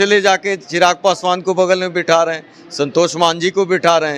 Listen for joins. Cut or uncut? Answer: uncut